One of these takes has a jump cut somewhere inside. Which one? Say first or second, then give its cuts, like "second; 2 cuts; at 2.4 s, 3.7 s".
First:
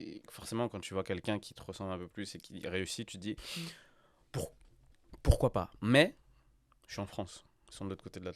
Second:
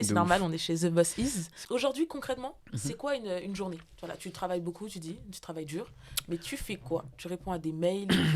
second; 1 cut; at 1.6 s